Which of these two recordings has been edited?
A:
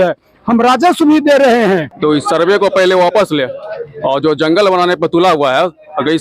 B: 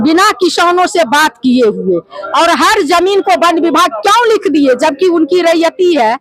A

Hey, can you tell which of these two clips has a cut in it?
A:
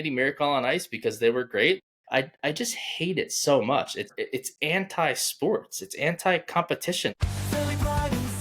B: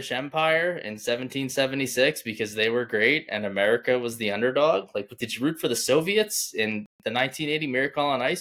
A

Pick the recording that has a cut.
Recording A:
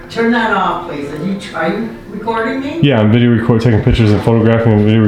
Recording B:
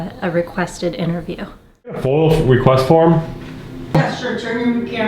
B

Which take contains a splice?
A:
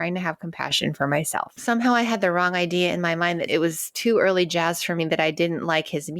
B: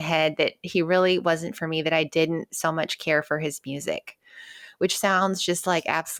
A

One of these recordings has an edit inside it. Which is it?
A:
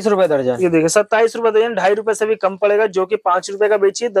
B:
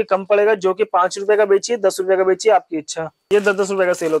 B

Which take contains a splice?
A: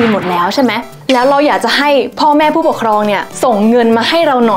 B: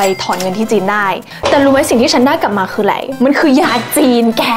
B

